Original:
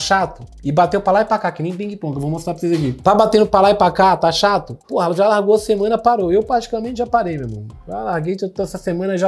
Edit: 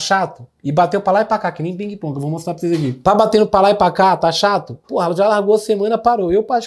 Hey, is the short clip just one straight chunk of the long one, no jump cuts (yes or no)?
yes